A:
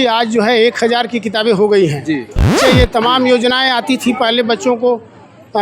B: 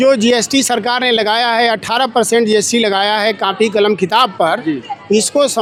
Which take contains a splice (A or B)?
A